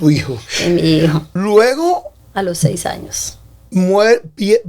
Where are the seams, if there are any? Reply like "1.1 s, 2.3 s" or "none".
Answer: 1.3 s, 2.2 s